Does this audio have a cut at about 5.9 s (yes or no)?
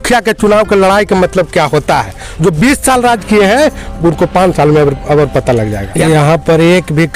yes